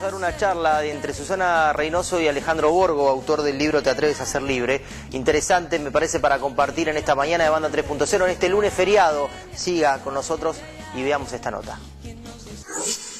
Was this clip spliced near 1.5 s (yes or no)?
yes